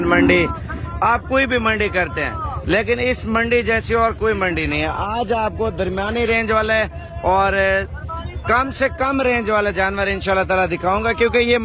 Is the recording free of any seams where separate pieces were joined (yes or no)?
yes